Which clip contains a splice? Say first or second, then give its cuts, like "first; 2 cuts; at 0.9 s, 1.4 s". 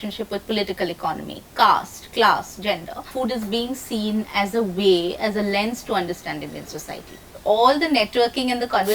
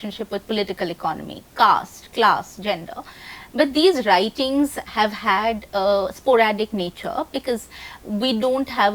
first; 2 cuts; at 3.1 s, 7.3 s